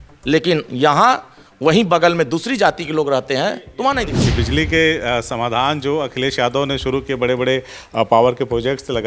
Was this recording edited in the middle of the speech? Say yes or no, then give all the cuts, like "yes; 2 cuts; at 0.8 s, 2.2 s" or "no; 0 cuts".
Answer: yes; 1 cut; at 4.2 s